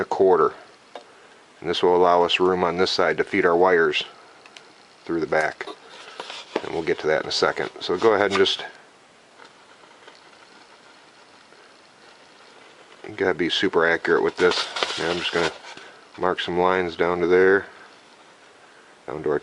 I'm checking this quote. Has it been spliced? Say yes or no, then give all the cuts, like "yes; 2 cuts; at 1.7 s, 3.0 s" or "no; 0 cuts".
yes; 1 cut; at 11.3 s